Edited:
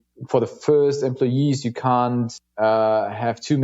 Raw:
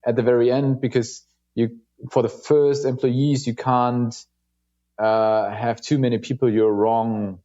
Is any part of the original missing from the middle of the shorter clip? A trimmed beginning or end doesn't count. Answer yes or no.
yes